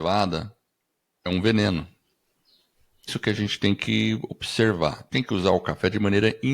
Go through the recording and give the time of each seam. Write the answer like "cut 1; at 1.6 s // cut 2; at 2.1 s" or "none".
cut 1; at 3.1 s // cut 2; at 5.0 s